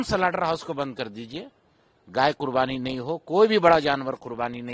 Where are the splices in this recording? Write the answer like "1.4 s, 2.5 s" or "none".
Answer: none